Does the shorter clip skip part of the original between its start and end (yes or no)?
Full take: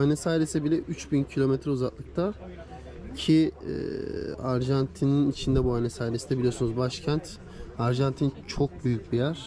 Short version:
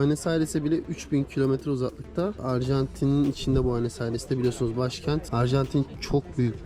yes